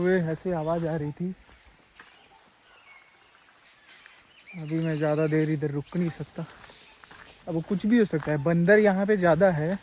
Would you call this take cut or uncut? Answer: uncut